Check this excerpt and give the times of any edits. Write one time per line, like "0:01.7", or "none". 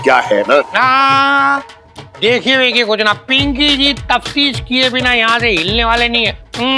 none